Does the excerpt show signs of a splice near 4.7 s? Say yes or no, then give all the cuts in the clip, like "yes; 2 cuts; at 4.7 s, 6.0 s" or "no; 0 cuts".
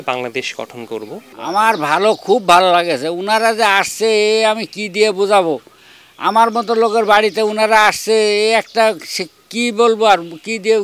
no; 1 cut; at 1.2 s